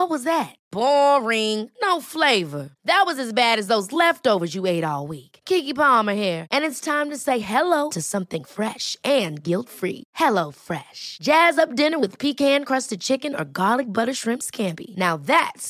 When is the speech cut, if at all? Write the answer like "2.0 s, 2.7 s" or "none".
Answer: none